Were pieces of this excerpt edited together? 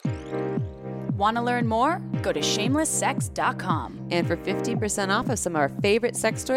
yes; 1 cut; at 1.2 s

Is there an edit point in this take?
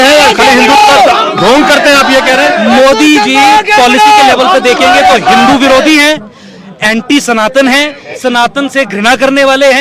no; 0 cuts

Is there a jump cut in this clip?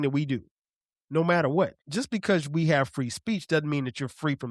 yes; 1 cut; at 1.8 s

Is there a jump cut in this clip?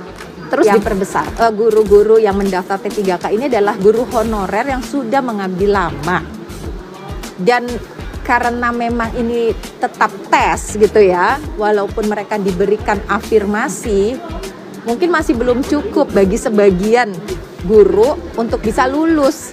yes; 1 cut; at 1.3 s

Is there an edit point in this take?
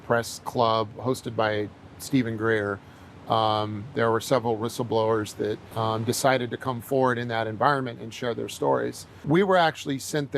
yes; 2 cuts; at 5.7 s, 9.1 s

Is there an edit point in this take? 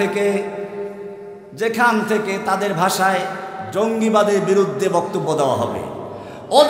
no; 0 cuts

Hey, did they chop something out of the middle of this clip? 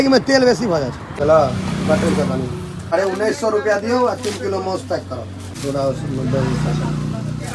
yes; 3 cuts; at 1.0 s, 2.7 s, 5.6 s

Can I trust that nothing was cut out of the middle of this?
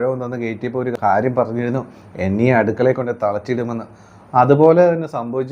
no; 1 cut; at 0.9 s

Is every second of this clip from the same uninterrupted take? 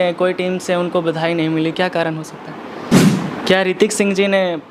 no; 1 cut; at 2.9 s

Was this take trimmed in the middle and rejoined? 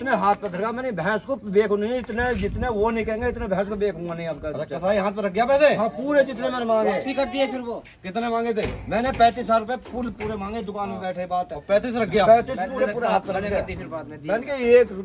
no; 0 cuts

